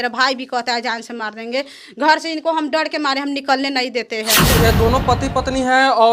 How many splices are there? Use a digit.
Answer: 1